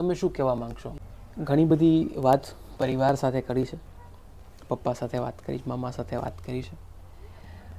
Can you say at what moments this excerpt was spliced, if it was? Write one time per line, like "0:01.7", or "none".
0:01.0